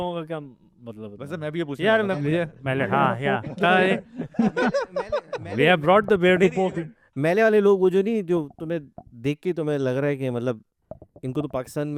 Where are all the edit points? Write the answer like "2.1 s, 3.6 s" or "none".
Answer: none

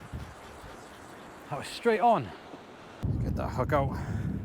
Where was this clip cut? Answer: 3.0 s

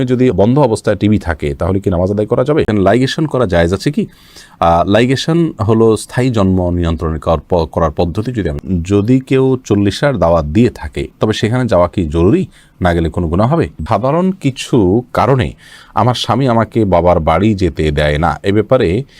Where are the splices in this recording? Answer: 2.7 s, 8.6 s, 13.8 s

